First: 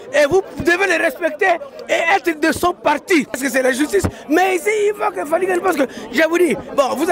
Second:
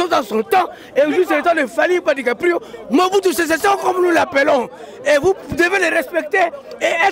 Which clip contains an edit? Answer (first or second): first